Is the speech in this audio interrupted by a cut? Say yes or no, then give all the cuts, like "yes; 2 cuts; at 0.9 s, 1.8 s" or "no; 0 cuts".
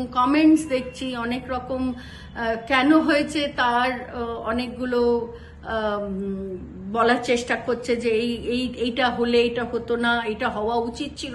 no; 0 cuts